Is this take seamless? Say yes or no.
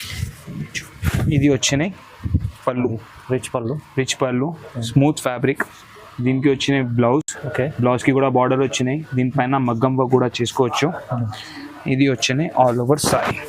yes